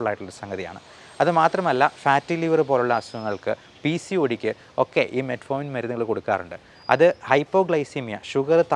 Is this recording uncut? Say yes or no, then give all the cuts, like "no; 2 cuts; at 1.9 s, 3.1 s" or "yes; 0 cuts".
yes; 0 cuts